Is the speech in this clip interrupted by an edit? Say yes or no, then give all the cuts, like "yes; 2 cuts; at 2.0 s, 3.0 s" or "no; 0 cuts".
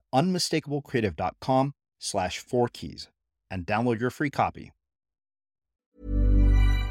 yes; 1 cut; at 5.9 s